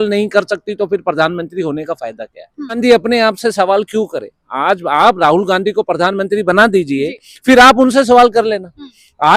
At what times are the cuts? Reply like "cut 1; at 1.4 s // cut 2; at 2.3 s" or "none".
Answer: cut 1; at 2.8 s